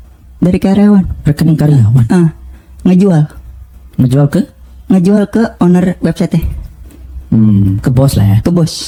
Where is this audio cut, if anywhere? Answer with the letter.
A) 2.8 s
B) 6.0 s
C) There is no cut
C